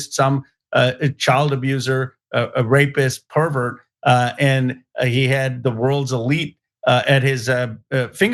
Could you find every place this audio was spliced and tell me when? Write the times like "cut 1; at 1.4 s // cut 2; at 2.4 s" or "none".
none